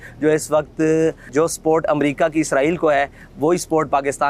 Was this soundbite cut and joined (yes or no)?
yes